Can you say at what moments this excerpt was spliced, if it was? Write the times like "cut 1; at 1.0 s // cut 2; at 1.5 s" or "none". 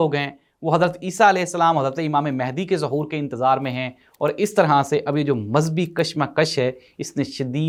none